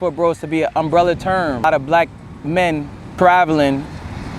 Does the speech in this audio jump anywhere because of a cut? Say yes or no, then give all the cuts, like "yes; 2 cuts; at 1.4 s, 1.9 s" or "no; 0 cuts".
yes; 2 cuts; at 1.6 s, 3.0 s